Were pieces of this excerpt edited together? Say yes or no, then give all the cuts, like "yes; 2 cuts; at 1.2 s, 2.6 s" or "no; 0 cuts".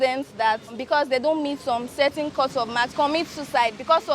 yes; 2 cuts; at 0.8 s, 2.9 s